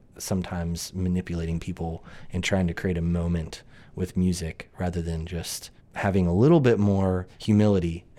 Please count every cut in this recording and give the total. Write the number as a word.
two